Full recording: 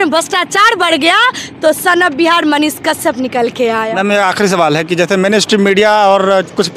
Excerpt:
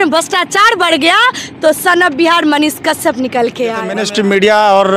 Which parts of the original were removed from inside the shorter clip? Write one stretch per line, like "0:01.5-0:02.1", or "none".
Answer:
0:03.9-0:05.3